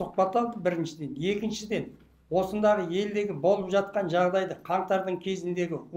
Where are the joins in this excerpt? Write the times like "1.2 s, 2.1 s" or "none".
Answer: none